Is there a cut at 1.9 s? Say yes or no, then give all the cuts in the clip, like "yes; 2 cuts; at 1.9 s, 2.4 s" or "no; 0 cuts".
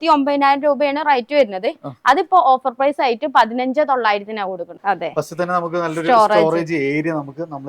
no; 1 cut; at 4.7 s